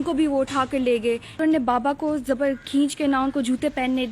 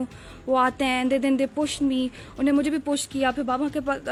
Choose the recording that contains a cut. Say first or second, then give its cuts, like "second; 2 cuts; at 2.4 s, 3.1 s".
first; 1 cut; at 1.4 s